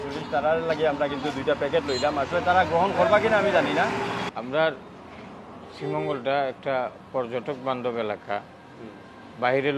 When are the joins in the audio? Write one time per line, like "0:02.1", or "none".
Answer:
0:04.2